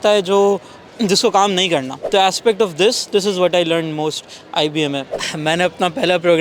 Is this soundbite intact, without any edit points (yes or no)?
no